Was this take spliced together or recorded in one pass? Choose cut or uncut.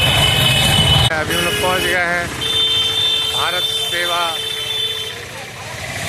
cut